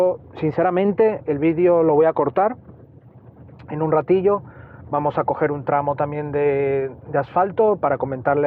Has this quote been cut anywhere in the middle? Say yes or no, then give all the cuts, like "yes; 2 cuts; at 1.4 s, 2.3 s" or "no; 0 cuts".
no; 0 cuts